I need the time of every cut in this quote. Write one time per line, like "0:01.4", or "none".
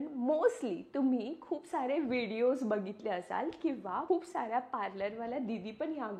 none